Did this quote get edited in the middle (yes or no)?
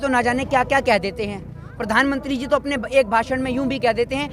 no